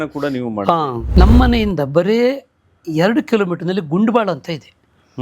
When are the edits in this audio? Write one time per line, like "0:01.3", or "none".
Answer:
0:01.0